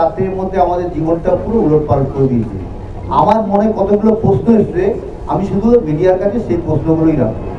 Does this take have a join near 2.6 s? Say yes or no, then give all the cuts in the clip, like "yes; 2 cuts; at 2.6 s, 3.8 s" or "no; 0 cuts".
no; 0 cuts